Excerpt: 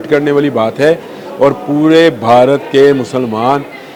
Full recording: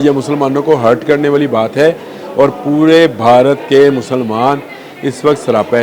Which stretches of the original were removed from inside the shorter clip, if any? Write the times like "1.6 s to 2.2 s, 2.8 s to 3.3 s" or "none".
none